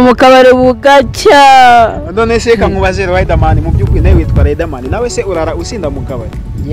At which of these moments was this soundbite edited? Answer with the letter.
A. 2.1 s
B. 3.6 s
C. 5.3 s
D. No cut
D